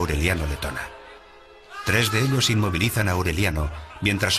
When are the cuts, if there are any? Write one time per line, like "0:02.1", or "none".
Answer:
none